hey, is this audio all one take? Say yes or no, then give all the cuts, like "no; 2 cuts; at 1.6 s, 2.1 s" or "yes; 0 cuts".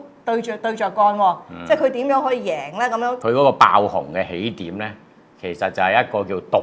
no; 1 cut; at 3.2 s